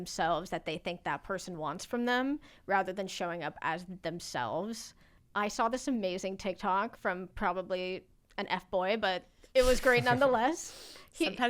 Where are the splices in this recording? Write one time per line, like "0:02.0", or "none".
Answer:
none